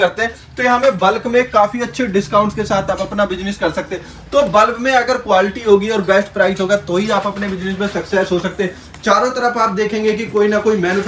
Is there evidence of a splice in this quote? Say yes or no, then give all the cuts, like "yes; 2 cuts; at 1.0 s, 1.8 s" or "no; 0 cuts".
no; 0 cuts